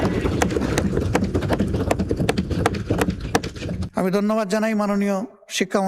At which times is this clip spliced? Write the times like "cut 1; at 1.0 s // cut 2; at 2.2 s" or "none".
cut 1; at 3.8 s